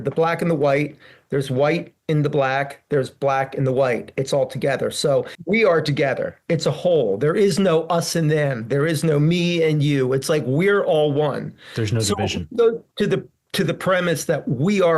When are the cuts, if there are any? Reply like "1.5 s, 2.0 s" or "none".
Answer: 5.3 s